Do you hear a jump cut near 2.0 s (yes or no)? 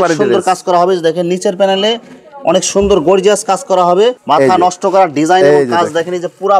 no